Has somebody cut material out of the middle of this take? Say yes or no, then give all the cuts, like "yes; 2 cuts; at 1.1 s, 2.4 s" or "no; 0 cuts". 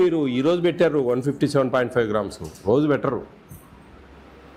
no; 0 cuts